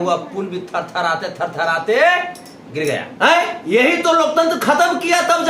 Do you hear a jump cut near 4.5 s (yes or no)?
no